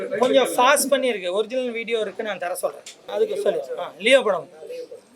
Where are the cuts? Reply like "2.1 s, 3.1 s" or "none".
3.1 s